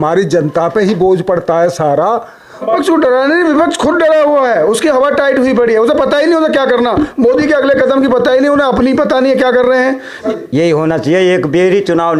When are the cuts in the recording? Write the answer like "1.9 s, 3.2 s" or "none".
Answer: 2.7 s, 10.2 s